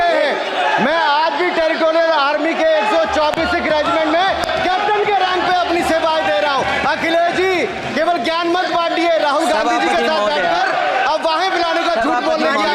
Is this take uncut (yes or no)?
yes